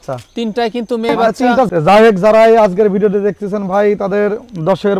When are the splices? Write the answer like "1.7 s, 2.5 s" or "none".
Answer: 1.7 s